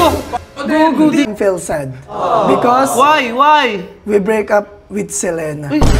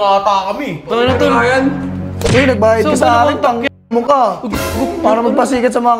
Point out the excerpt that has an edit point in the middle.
first; 1 cut; at 1.3 s

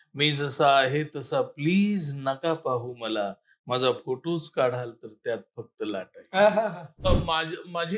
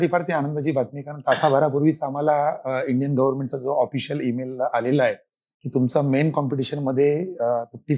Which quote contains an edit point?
first; 1 cut; at 7.1 s

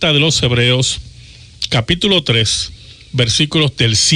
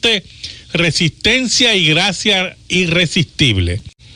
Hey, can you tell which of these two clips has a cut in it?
first; 1 cut; at 2.4 s

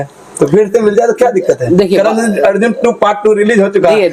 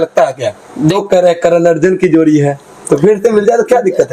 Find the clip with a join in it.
second; 1 cut; at 1.0 s

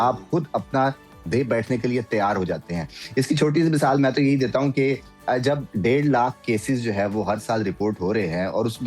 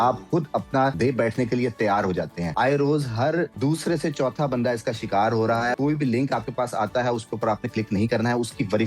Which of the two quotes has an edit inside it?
second; 4 cuts; at 0.9 s, 2.4 s, 3.5 s, 5.7 s

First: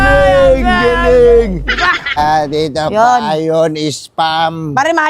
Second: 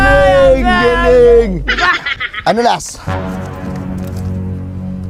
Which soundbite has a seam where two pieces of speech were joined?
first; 1 cut; at 2.2 s

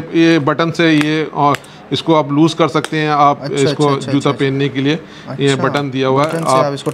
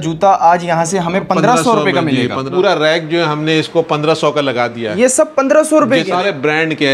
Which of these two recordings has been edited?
second; 2 cuts; at 2.5 s, 6.1 s

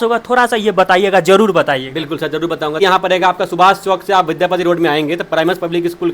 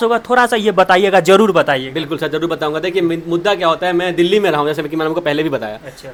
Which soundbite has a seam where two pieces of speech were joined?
first; 1 cut; at 2.8 s

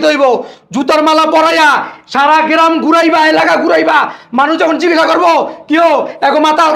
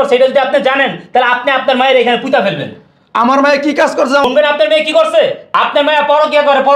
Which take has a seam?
second; 1 cut; at 4.2 s

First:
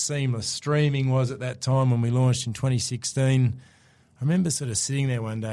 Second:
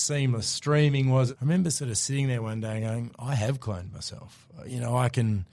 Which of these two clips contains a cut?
second; 1 cut; at 1.3 s

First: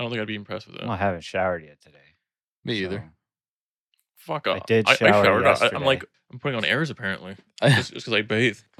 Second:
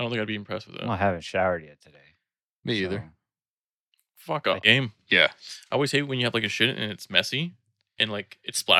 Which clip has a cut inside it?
second; 1 cut; at 4.6 s

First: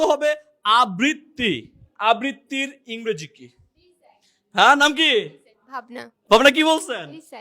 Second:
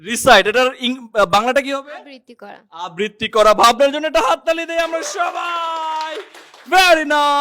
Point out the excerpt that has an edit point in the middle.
first; 1 cut; at 6.1 s

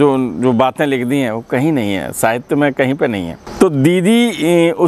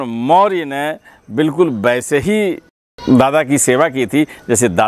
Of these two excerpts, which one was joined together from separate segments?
first; 1 cut; at 3.4 s

